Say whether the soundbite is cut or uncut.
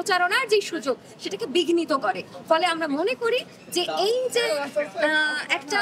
uncut